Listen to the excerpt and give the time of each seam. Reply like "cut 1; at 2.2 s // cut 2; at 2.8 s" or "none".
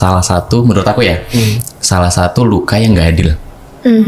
none

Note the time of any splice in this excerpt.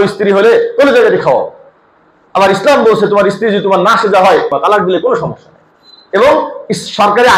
cut 1; at 4.5 s

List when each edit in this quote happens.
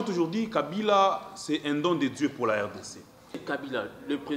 cut 1; at 3.4 s

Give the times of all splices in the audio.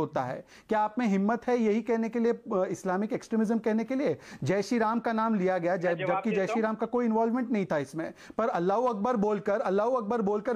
none

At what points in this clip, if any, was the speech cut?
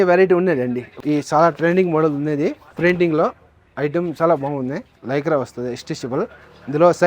cut 1; at 1.0 s // cut 2; at 4.9 s

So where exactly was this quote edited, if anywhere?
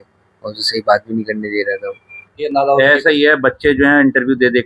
cut 1; at 2.4 s

